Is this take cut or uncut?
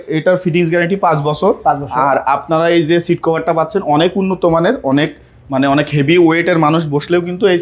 uncut